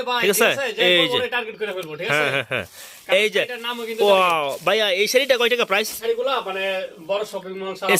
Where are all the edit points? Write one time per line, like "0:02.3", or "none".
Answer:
none